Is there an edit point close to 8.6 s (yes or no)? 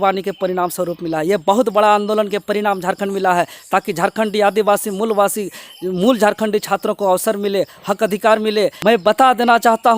yes